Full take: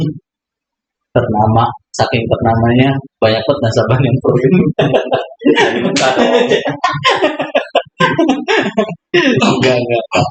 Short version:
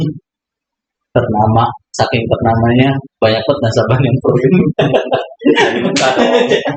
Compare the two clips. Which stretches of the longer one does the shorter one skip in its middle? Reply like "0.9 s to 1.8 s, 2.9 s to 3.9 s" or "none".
none